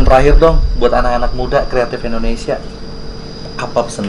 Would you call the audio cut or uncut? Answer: uncut